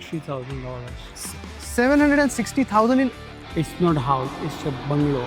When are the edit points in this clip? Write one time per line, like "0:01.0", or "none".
none